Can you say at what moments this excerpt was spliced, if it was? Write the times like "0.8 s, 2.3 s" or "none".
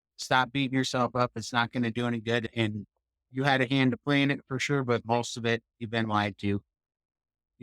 2.5 s